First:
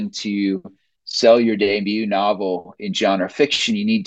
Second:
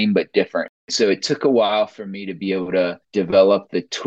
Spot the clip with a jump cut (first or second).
second